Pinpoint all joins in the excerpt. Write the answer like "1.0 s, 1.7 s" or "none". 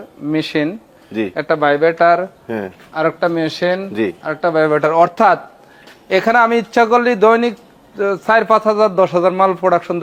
none

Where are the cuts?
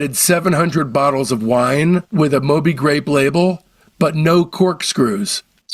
none

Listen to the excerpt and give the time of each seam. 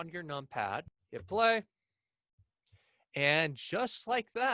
1.0 s

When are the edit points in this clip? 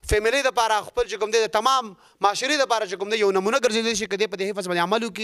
none

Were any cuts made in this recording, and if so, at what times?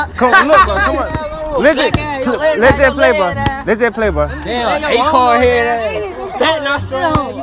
none

